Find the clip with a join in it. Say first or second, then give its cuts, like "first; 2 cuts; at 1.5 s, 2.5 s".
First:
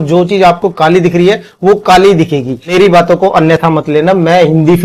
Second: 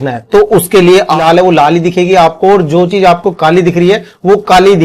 second; 1 cut; at 1.1 s